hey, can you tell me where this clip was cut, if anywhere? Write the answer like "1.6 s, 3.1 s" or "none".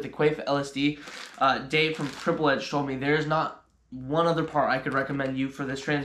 none

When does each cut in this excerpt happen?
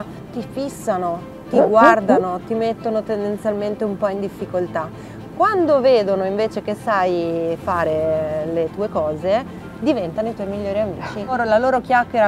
none

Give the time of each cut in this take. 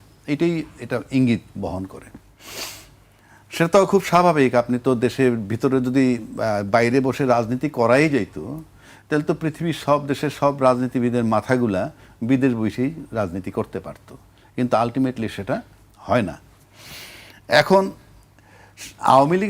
none

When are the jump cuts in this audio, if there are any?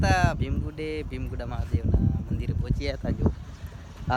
none

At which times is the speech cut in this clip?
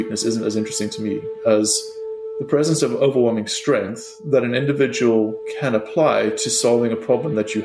none

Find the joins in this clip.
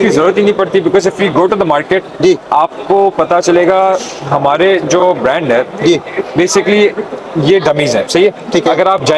none

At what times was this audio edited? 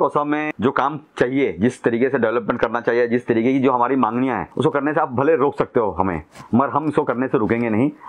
none

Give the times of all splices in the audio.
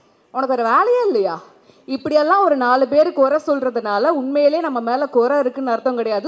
none

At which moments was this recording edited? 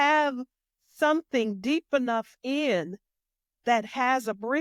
none

